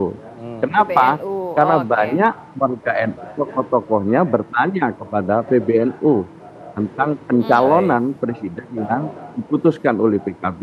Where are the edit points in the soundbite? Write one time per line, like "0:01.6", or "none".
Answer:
none